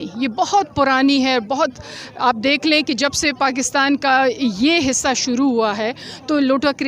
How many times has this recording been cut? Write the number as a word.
zero